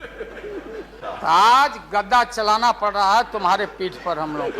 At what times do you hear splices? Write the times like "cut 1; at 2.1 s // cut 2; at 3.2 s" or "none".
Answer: cut 1; at 1.0 s